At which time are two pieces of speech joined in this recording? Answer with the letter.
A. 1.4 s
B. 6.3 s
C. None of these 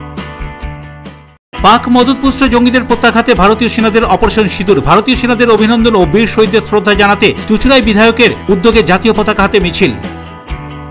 A